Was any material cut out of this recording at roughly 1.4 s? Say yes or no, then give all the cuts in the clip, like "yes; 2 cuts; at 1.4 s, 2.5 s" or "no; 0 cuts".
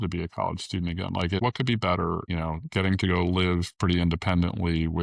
yes; 2 cuts; at 1.4 s, 2.3 s